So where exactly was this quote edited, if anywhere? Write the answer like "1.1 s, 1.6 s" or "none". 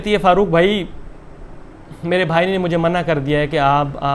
none